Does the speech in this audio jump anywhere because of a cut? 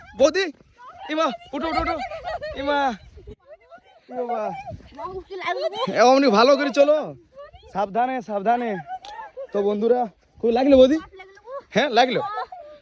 no; 0 cuts

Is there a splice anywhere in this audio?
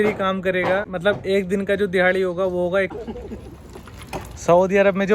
yes; 2 cuts; at 0.9 s, 2.9 s

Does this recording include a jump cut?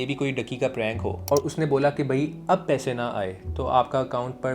yes; 1 cut; at 1.3 s

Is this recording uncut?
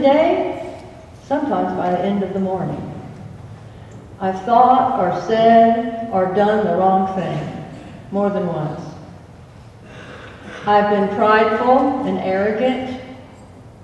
yes; 0 cuts

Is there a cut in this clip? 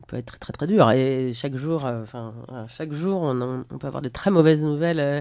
no; 0 cuts

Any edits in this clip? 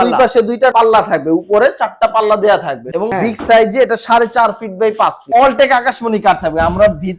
yes; 2 cuts; at 2.9 s, 5.3 s

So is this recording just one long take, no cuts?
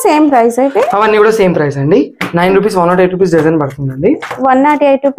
yes; 0 cuts

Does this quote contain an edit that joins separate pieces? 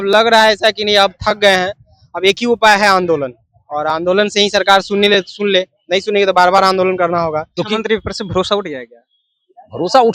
yes; 1 cut; at 7.5 s

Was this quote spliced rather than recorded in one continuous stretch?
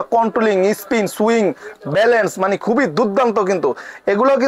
no; 0 cuts

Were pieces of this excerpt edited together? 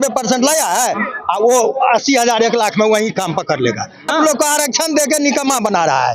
yes; 1 cut; at 4.1 s

